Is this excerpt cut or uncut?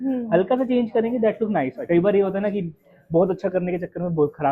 cut